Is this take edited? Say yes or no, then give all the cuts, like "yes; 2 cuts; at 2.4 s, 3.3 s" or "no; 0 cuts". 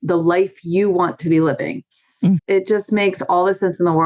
yes; 1 cut; at 2.4 s